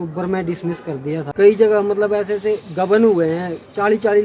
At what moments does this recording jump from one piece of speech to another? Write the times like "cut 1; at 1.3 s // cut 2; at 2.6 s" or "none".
cut 1; at 1.3 s